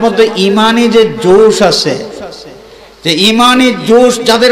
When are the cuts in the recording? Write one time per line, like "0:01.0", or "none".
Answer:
none